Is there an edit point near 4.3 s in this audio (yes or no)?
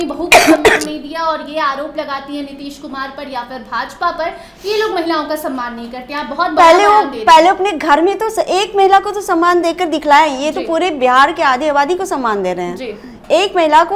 no